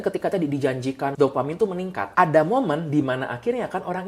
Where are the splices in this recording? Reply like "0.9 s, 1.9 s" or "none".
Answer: 1.1 s, 2.0 s